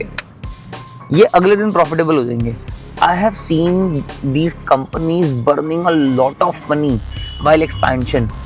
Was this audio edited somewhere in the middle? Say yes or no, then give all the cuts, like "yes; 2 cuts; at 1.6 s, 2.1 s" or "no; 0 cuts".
no; 0 cuts